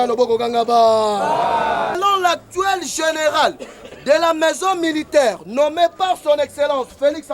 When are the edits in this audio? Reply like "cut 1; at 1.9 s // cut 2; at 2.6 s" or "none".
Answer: cut 1; at 2.0 s